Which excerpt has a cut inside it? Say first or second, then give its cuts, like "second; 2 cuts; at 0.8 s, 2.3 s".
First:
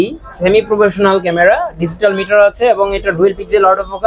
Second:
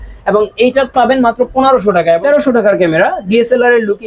second; 1 cut; at 2.2 s